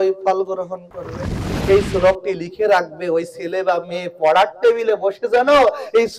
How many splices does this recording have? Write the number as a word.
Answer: one